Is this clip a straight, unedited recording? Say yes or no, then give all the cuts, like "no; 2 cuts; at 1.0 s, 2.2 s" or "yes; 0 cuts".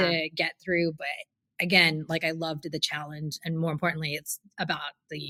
yes; 0 cuts